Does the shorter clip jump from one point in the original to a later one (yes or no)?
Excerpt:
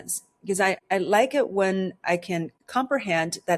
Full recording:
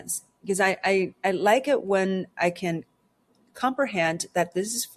yes